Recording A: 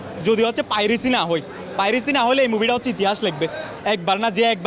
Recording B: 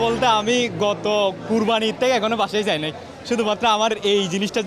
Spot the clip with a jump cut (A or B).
A